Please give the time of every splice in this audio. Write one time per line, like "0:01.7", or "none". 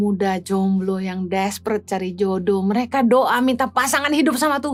none